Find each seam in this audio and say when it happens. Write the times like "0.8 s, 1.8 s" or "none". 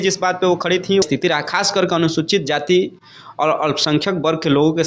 1.0 s